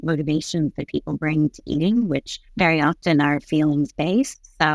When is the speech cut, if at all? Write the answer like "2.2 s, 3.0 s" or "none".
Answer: 2.4 s